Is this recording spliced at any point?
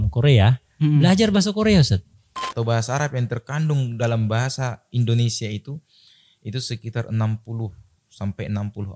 yes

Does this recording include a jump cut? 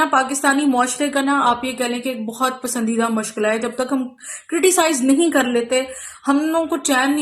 no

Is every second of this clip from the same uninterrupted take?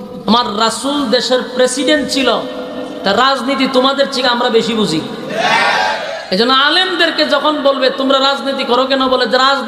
no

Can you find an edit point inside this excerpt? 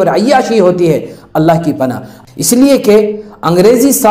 yes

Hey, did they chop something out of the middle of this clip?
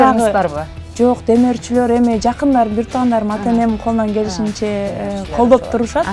no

